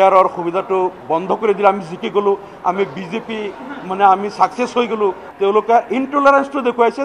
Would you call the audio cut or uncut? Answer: cut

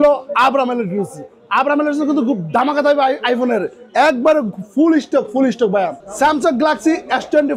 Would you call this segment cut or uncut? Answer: cut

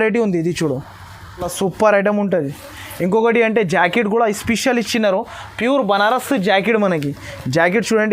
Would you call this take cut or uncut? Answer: cut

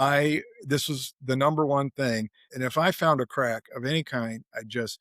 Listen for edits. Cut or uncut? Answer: cut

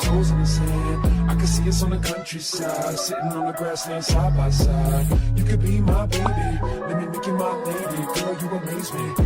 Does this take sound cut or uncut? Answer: uncut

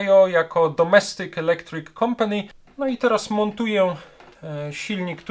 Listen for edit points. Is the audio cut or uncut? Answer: cut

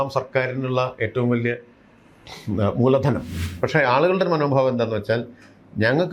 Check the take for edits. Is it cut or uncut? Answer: cut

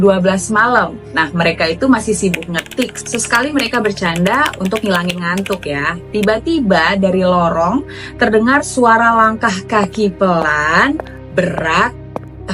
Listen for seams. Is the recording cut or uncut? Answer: uncut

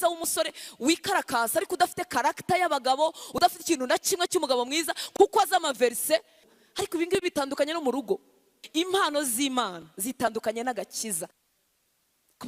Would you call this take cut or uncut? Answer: cut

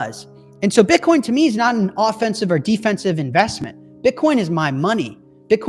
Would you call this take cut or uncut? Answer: uncut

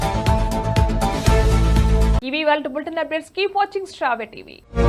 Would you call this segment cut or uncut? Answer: uncut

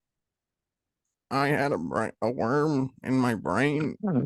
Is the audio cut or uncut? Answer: uncut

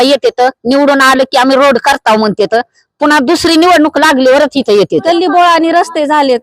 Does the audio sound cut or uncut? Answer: cut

